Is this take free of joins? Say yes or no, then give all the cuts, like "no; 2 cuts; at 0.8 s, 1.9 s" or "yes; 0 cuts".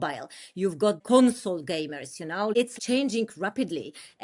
no; 2 cuts; at 1.0 s, 2.6 s